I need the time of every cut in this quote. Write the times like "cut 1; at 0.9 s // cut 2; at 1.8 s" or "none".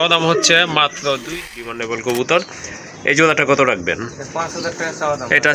cut 1; at 1.5 s